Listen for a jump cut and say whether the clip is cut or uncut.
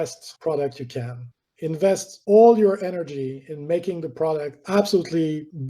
uncut